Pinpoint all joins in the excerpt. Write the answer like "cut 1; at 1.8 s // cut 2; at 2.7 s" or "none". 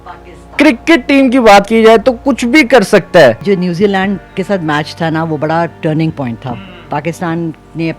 cut 1; at 3.4 s